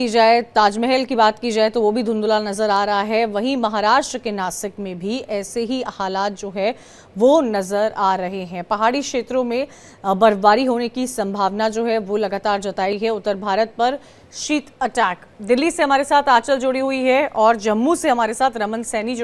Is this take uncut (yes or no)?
no